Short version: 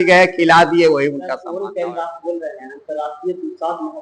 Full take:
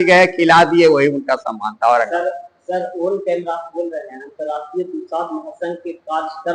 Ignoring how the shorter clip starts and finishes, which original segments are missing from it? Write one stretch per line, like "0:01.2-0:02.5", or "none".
0:01.4-0:02.9